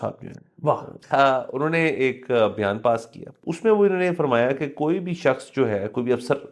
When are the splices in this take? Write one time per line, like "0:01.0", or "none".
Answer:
0:00.9
0:03.4